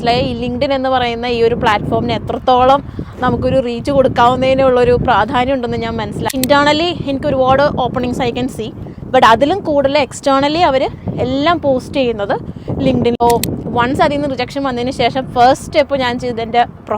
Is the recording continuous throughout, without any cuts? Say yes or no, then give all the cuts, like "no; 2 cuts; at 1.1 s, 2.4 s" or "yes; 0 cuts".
no; 2 cuts; at 6.3 s, 13.2 s